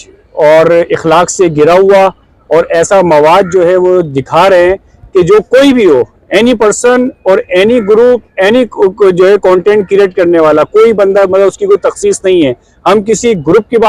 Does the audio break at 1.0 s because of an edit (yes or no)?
no